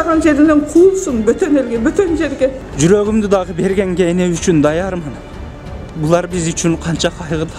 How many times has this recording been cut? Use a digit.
1